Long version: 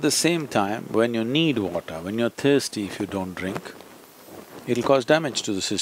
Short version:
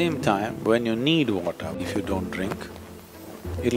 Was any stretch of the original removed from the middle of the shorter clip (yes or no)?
yes